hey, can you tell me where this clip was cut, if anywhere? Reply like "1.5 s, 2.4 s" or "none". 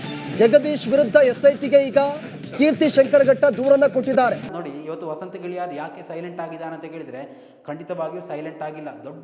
4.5 s